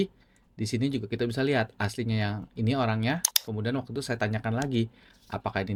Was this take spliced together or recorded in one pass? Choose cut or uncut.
uncut